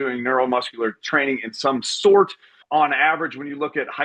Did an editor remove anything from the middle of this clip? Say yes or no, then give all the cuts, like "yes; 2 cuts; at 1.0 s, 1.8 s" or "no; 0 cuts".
yes; 1 cut; at 2.6 s